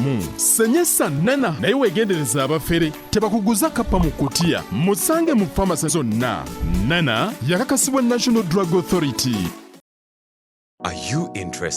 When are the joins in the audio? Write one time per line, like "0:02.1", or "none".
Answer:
0:10.1

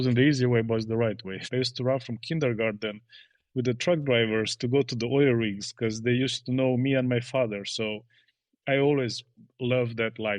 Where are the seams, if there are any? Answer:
0:01.5

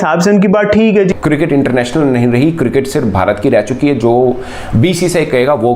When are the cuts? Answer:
0:01.1

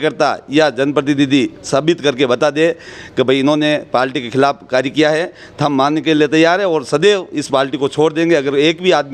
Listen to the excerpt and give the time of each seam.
none

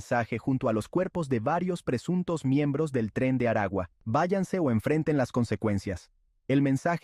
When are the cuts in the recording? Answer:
0:04.0

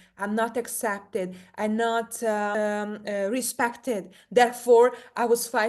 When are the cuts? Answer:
0:02.5

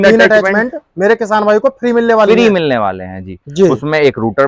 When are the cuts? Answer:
none

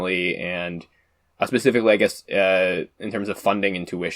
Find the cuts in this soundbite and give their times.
none

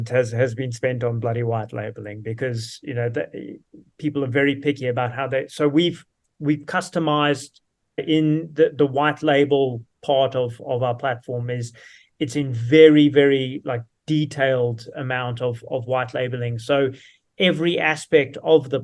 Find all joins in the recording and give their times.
none

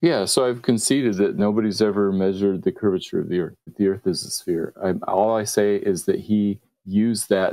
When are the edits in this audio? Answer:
0:03.6

